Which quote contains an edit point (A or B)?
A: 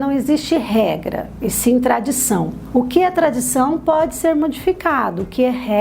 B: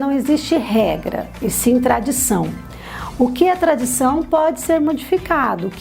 A